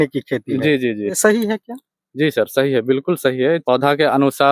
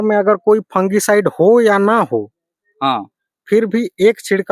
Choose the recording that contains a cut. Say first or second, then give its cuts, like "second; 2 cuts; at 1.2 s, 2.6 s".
first; 2 cuts; at 1.2 s, 3.6 s